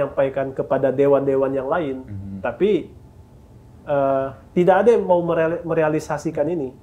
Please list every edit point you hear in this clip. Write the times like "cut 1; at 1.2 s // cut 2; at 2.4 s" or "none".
none